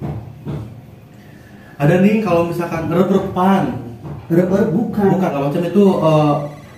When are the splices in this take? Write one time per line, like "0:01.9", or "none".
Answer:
0:05.3